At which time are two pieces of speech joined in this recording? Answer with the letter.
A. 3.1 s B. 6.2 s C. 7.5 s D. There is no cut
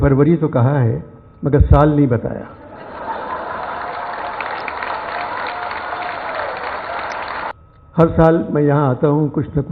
C